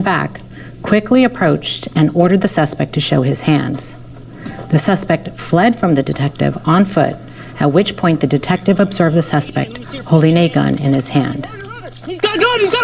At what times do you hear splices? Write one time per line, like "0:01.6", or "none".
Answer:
0:02.7
0:11.2